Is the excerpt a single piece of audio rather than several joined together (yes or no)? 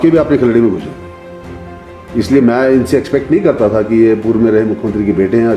yes